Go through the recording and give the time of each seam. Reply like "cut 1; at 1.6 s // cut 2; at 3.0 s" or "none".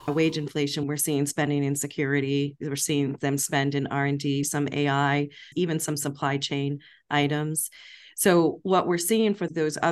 cut 1; at 0.8 s // cut 2; at 4.5 s // cut 3; at 5.5 s